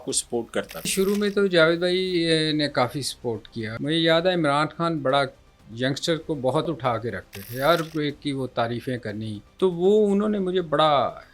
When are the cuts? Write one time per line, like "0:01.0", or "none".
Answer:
0:00.9
0:03.7
0:06.8
0:09.4

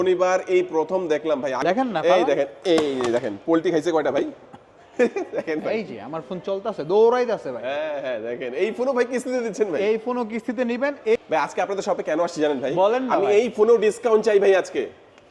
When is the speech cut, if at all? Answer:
0:01.6
0:11.2

